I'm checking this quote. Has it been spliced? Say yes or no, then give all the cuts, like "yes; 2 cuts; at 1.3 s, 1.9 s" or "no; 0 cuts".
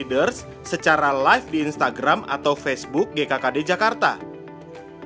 yes; 1 cut; at 4.2 s